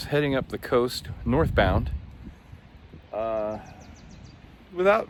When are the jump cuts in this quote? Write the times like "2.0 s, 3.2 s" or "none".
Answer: none